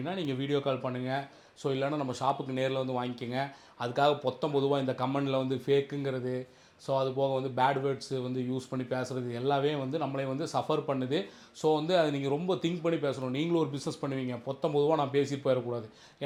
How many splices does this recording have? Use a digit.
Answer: 0